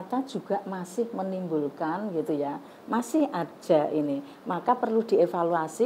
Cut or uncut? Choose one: uncut